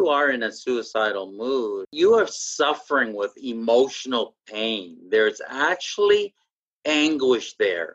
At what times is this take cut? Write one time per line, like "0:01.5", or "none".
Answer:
0:01.9